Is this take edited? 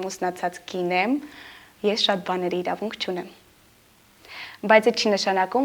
no; 0 cuts

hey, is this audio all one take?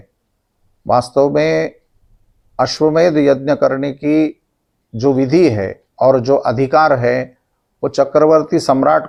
yes; 0 cuts

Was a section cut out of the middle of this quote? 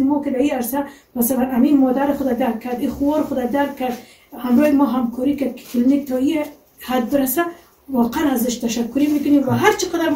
no; 0 cuts

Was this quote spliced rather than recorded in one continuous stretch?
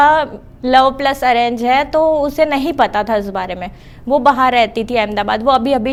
no; 0 cuts

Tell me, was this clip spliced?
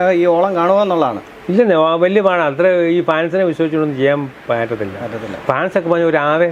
no; 0 cuts

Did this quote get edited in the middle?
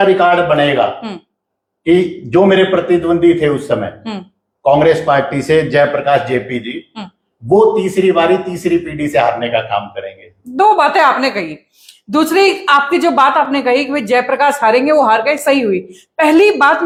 no; 0 cuts

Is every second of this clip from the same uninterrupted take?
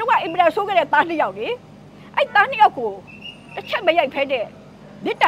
yes; 0 cuts

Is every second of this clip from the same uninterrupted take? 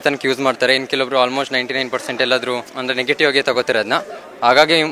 yes; 0 cuts

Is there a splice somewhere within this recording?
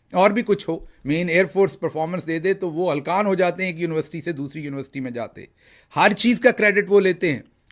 no; 0 cuts

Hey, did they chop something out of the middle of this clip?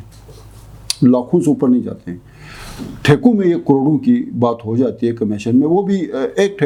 no; 0 cuts

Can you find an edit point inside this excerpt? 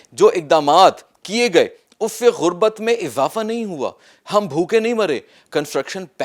yes; 1 cut; at 5.4 s

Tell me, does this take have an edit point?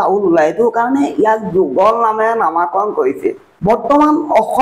yes; 1 cut; at 3.5 s

